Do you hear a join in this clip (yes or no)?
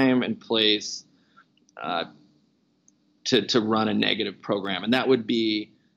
no